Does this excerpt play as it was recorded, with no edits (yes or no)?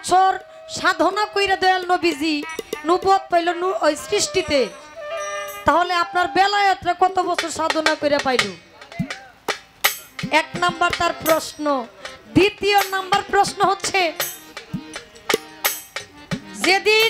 yes